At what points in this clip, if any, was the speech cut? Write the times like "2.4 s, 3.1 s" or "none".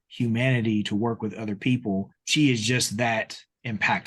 2.2 s